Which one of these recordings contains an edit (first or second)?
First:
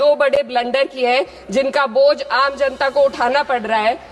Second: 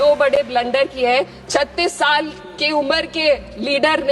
second